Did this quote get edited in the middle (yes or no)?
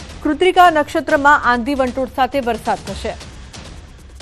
yes